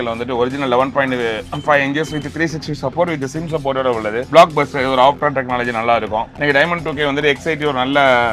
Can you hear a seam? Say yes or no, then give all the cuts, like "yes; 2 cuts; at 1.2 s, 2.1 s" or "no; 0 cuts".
no; 0 cuts